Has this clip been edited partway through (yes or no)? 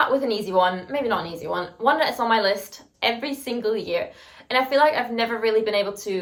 no